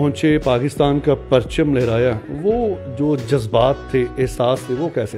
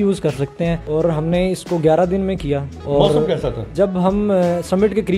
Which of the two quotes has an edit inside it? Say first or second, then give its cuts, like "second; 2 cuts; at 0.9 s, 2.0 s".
second; 3 cuts; at 0.8 s, 2.7 s, 3.6 s